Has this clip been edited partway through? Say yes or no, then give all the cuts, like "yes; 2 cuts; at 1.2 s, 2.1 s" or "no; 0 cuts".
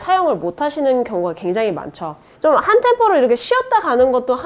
yes; 1 cut; at 2.3 s